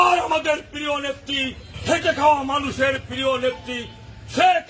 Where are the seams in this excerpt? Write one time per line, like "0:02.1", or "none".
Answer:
0:01.7